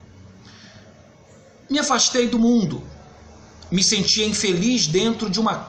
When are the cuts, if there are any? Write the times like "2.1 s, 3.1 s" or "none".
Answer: 4.5 s